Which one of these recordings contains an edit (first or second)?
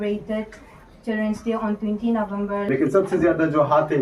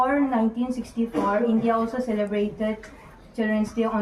first